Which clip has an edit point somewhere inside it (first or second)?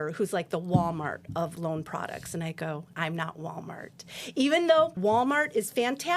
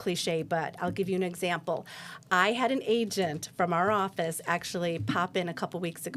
first